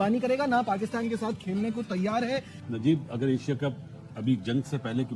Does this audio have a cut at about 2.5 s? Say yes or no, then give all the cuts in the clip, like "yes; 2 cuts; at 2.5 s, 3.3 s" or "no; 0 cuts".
yes; 1 cut; at 2.5 s